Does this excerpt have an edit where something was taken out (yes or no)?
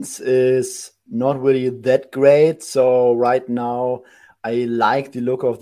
no